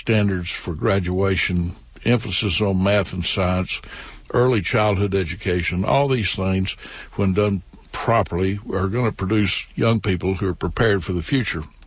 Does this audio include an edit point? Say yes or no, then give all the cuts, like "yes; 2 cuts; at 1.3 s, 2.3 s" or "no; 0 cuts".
yes; 1 cut; at 2.5 s